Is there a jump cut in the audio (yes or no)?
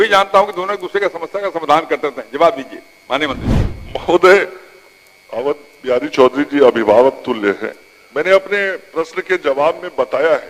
no